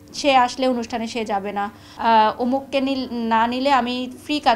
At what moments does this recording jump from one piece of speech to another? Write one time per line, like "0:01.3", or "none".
0:01.8